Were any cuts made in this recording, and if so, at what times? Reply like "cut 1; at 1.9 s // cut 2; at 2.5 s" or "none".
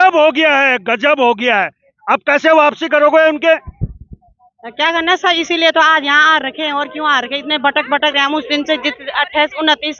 none